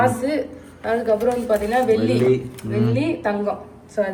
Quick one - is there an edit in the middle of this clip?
no; 0 cuts

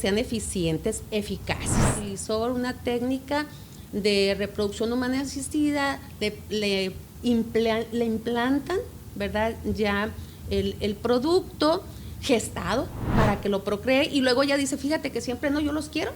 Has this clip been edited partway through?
yes; 2 cuts; at 2.1 s, 13.0 s

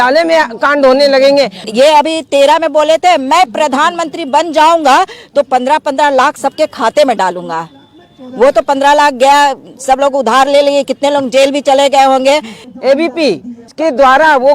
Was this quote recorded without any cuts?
yes; 0 cuts

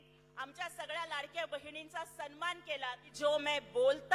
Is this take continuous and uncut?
no; 1 cut; at 3.1 s

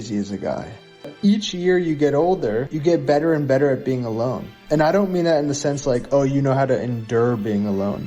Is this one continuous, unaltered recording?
no; 1 cut; at 1.1 s

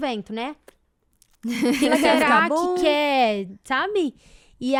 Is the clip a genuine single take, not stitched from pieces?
yes; 0 cuts

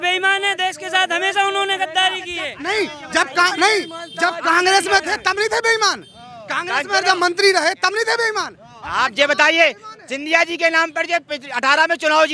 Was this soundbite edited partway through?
no; 0 cuts

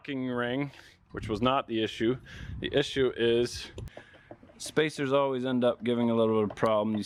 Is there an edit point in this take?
no; 0 cuts

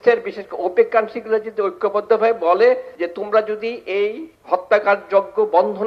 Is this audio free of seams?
no; 2 cuts; at 2.9 s, 4.3 s

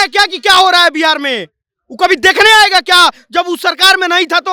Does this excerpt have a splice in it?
no; 0 cuts

